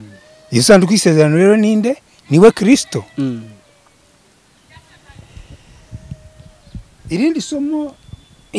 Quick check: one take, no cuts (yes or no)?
yes